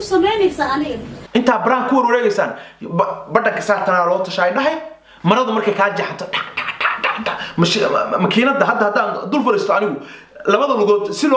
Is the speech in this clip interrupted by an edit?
yes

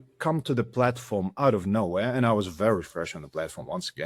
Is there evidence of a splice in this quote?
no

